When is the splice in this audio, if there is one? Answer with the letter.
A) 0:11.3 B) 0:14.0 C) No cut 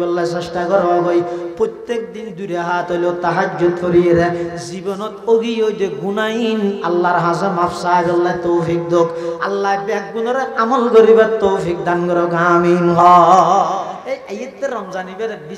B